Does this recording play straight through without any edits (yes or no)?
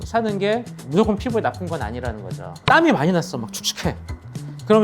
no